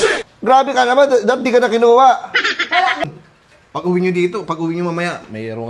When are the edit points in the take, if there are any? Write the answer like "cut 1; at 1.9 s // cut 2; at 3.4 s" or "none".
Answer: cut 1; at 3.0 s